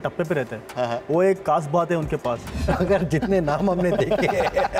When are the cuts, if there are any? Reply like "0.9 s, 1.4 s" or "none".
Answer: 2.5 s